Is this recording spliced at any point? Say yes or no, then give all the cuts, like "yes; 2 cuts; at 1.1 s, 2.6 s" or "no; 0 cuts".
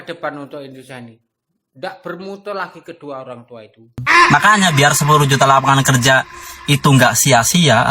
yes; 1 cut; at 4.0 s